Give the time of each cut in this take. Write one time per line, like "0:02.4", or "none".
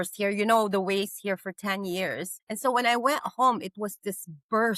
0:02.4